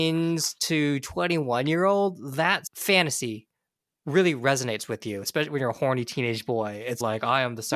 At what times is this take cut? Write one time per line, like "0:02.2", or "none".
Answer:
none